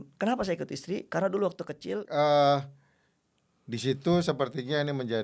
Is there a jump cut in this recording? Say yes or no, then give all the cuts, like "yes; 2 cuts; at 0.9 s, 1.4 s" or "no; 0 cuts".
yes; 1 cut; at 2.0 s